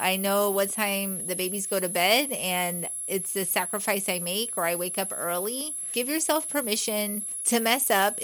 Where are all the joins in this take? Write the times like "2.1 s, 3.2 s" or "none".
5.9 s, 7.3 s